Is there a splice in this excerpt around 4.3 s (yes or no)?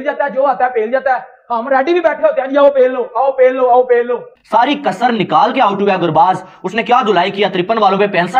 yes